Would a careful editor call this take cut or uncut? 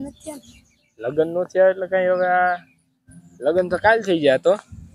uncut